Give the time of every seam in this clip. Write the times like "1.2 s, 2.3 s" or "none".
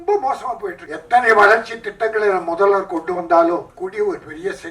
0.9 s, 3.7 s